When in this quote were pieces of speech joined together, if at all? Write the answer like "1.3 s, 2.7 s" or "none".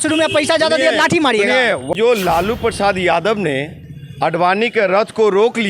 1.9 s

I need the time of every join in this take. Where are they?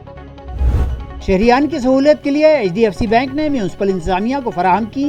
1.0 s

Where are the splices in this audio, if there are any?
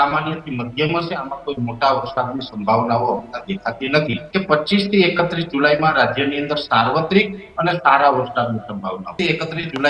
4.2 s, 9.1 s

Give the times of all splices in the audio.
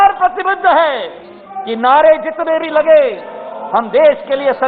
none

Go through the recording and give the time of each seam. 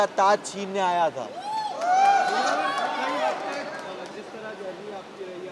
none

